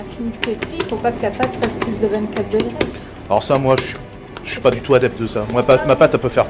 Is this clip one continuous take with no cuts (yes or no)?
yes